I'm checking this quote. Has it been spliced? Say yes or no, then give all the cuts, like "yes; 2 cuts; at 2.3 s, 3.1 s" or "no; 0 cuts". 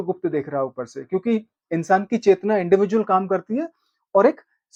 no; 0 cuts